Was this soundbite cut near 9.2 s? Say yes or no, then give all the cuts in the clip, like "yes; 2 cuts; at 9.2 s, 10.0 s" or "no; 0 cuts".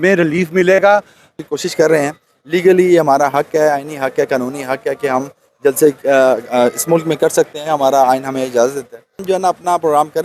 yes; 2 cuts; at 1.3 s, 9.2 s